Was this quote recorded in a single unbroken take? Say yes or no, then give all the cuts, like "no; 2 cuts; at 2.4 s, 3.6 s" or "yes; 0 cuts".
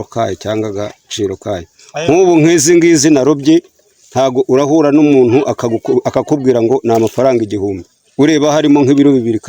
yes; 0 cuts